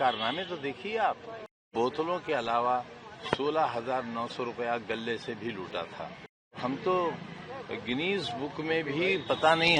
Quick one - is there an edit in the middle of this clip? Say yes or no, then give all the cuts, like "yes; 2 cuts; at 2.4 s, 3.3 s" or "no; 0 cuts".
yes; 2 cuts; at 1.7 s, 6.6 s